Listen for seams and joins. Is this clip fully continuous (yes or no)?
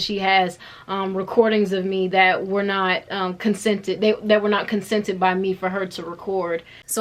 yes